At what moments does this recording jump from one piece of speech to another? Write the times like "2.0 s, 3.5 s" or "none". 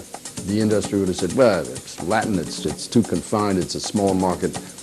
none